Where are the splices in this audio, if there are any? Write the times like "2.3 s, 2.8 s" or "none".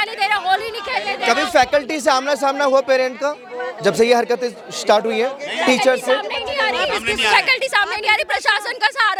none